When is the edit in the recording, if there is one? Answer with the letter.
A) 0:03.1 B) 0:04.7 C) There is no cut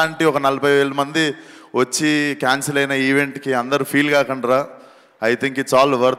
C